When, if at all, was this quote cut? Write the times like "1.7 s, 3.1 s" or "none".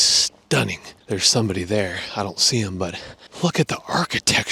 none